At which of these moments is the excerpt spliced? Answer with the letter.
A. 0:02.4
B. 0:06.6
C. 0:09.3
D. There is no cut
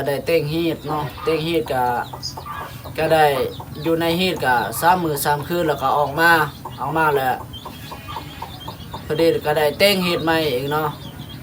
D